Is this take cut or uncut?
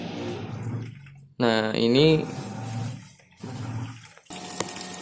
cut